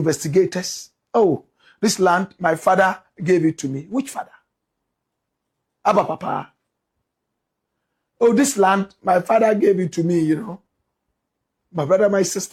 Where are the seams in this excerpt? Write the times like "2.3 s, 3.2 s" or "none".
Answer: none